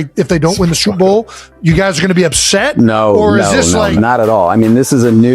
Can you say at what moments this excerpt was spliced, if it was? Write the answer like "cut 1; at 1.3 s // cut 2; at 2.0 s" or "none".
cut 1; at 3.9 s